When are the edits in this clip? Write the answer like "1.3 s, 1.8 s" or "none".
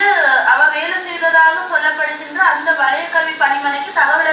none